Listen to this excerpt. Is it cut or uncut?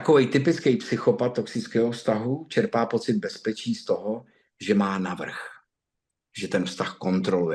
uncut